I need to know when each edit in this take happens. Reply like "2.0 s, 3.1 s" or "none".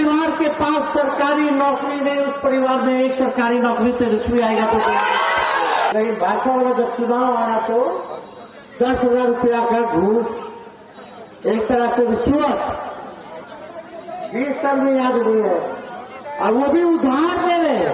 5.9 s